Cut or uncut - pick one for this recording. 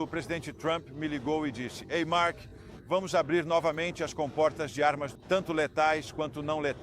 cut